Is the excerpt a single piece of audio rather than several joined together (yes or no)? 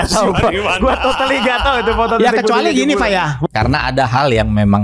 no